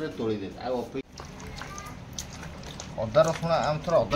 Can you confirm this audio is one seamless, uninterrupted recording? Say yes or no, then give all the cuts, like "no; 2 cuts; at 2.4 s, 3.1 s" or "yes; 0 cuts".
no; 1 cut; at 1.0 s